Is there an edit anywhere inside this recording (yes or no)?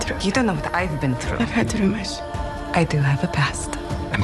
no